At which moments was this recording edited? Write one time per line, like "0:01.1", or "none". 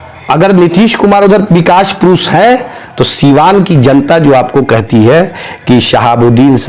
none